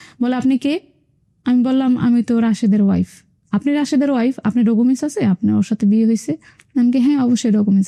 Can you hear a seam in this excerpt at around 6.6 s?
no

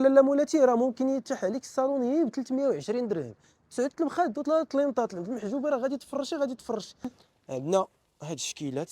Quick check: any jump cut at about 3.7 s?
no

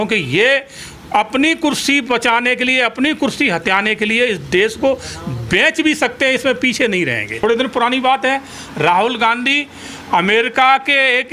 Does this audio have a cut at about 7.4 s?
yes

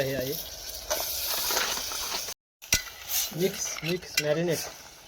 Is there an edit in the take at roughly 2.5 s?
yes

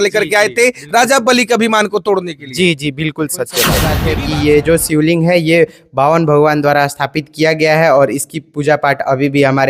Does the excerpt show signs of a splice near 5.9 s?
no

